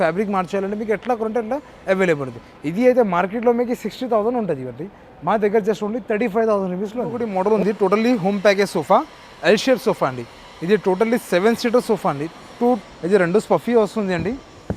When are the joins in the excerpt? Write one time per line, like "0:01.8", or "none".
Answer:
0:07.6
0:12.8